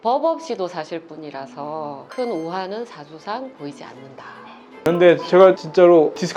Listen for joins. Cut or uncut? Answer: cut